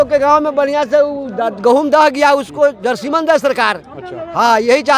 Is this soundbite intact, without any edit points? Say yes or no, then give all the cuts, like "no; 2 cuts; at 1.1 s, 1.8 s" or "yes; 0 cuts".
yes; 0 cuts